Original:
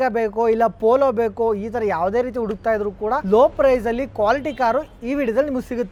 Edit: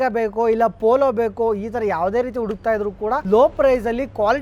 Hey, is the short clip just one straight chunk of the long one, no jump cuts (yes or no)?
yes